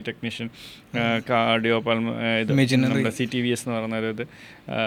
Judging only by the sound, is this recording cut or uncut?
uncut